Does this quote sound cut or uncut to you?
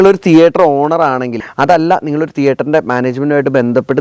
cut